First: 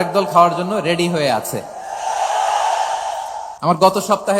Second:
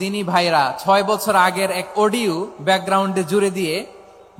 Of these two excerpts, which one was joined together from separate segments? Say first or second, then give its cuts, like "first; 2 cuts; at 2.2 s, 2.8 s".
first; 1 cut; at 3.4 s